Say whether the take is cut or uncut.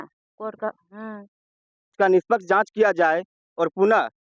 cut